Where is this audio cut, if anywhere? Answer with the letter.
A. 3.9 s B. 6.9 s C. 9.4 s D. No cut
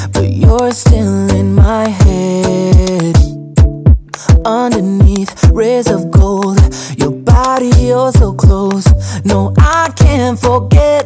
C